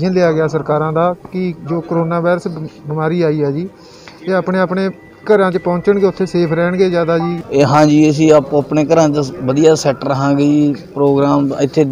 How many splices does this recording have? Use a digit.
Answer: 1